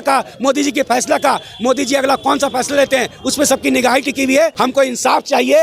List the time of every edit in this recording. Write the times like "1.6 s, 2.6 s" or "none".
4.7 s

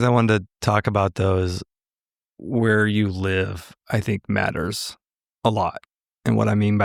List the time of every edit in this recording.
none

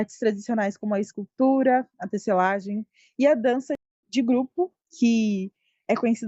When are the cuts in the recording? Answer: 3.9 s

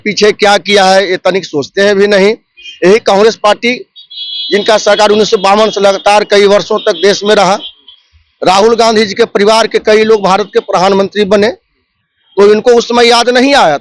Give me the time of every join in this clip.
none

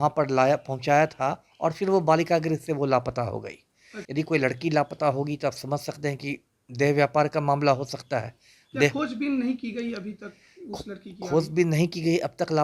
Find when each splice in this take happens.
4.0 s

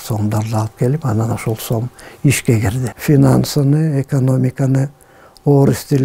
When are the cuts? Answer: 2.9 s

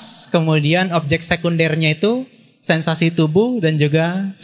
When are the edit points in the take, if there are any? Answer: none

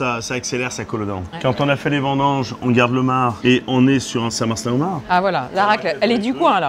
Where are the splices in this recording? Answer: none

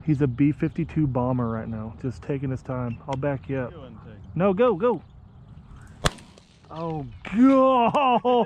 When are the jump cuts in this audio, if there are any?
none

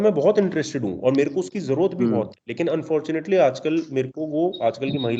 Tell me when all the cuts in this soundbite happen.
none

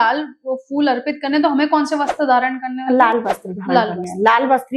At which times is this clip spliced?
none

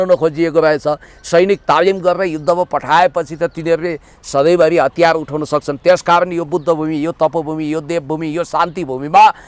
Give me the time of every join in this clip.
none

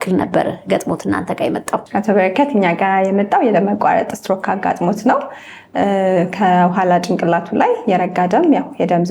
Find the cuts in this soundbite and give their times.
none

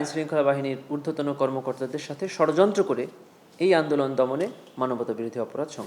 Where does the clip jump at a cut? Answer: none

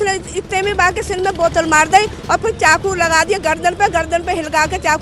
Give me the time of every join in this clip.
none

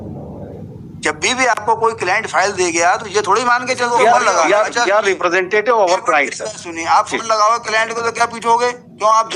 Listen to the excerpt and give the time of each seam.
3.9 s

